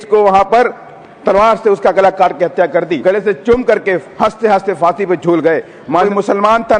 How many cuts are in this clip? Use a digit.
2